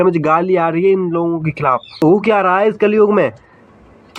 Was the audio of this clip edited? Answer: yes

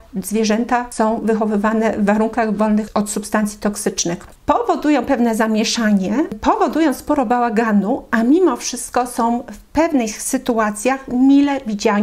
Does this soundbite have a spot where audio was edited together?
yes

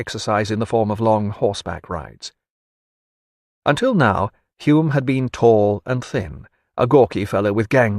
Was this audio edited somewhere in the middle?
yes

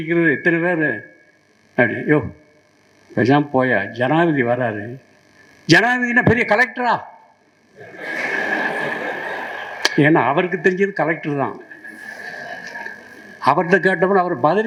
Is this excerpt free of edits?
yes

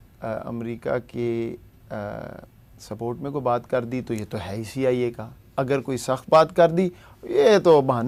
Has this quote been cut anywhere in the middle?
no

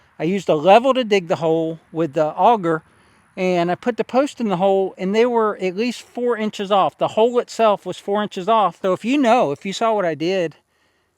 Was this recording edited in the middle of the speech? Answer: yes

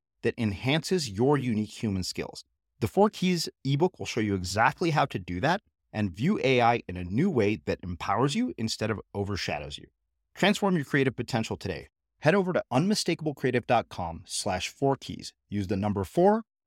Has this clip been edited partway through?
no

